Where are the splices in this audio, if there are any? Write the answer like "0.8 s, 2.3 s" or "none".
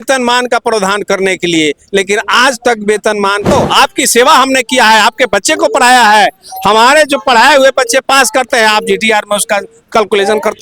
3.5 s